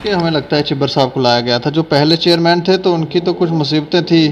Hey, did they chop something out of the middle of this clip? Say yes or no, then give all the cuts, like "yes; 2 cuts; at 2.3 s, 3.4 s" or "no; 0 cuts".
no; 0 cuts